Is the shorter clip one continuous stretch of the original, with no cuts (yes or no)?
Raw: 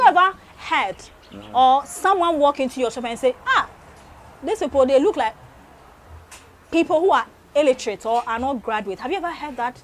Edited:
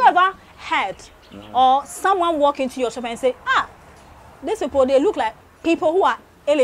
no